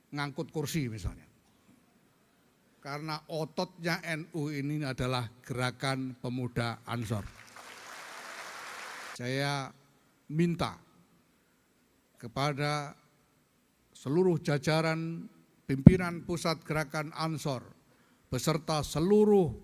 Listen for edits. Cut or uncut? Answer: cut